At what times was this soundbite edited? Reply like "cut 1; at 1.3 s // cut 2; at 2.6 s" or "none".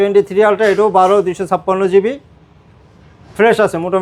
none